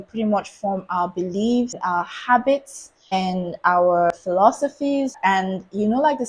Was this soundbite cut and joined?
yes; 4 cuts; at 1.8 s, 3.1 s, 4.1 s, 5.2 s

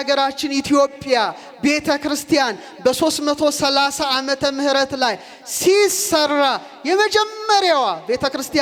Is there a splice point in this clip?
no; 0 cuts

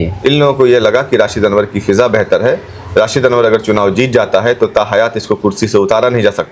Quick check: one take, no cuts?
yes; 0 cuts

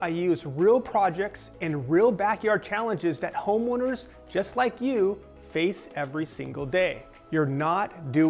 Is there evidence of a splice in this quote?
no; 0 cuts

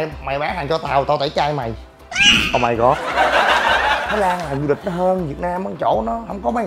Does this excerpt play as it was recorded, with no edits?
no; 1 cut; at 4.1 s

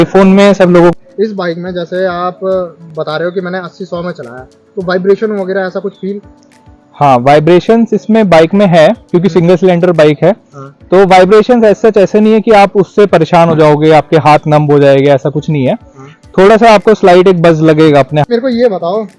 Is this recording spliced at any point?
yes; 2 cuts; at 0.9 s, 18.2 s

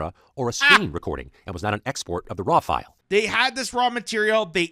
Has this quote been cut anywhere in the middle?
yes; 1 cut; at 2.9 s

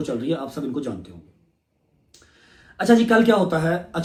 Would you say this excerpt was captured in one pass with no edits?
yes; 0 cuts

